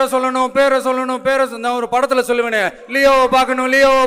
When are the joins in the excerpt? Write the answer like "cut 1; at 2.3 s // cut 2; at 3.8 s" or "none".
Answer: none

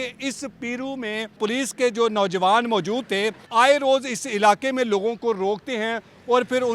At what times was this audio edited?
cut 1; at 1.4 s // cut 2; at 3.4 s

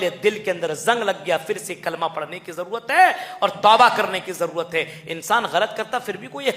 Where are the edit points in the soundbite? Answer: none

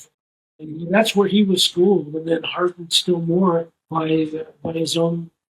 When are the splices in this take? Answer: cut 1; at 3.8 s

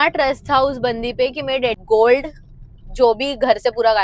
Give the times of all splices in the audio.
cut 1; at 1.8 s

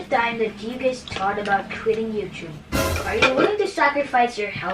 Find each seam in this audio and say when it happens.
cut 1; at 2.9 s

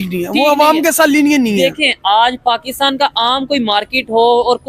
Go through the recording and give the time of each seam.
none

